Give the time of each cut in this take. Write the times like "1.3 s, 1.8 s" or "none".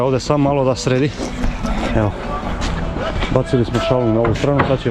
none